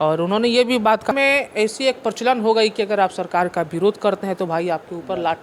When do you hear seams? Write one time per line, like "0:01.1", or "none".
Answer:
0:01.1